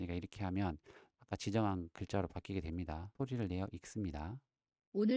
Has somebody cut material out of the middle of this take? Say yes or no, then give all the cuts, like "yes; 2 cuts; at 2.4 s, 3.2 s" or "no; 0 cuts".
yes; 1 cut; at 3.1 s